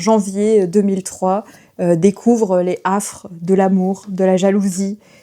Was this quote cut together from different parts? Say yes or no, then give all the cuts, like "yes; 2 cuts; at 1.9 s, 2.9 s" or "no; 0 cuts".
no; 0 cuts